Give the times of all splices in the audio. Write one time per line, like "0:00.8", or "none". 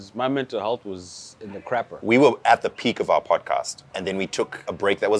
0:01.9
0:04.1